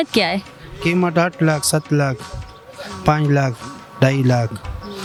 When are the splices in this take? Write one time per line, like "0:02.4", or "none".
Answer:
none